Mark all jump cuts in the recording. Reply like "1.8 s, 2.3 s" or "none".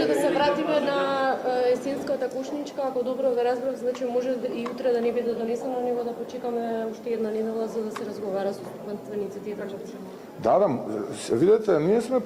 none